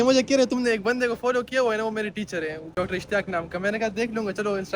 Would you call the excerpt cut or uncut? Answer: uncut